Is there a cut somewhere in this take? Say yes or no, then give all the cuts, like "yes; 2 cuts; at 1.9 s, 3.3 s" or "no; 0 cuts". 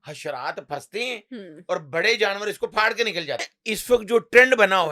yes; 1 cut; at 3.6 s